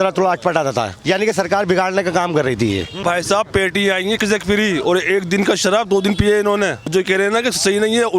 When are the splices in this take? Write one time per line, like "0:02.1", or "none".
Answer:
0:00.9
0:03.0
0:06.9

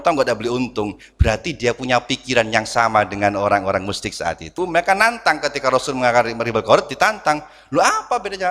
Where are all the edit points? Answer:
0:04.5

